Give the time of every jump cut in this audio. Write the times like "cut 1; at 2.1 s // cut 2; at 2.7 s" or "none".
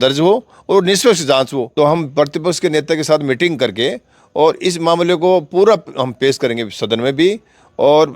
cut 1; at 1.7 s